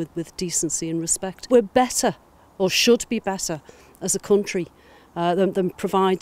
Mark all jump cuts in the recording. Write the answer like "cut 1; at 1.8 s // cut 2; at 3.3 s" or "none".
cut 1; at 1.4 s